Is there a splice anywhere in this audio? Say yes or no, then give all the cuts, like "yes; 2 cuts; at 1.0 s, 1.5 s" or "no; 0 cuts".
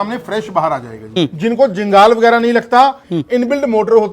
yes; 2 cuts; at 1.1 s, 3.1 s